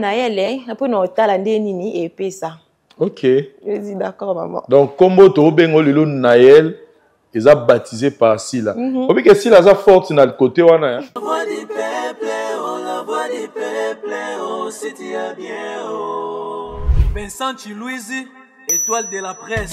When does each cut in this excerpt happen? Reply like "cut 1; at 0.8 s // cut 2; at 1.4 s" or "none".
cut 1; at 11.0 s